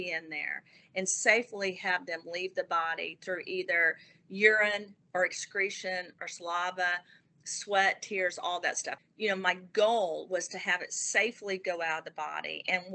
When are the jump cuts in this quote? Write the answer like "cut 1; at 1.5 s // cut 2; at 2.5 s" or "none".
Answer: cut 1; at 8.9 s